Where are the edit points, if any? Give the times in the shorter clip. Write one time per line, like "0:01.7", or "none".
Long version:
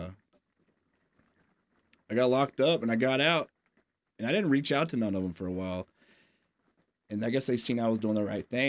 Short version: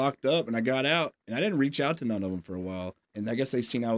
0:01.2
0:03.0